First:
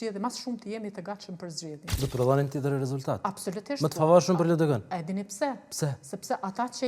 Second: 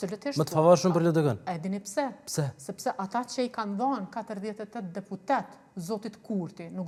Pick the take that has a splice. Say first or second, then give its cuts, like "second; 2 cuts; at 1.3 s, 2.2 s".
first; 1 cut; at 1.9 s